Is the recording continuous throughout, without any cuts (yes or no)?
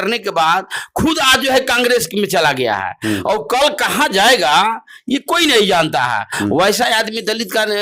yes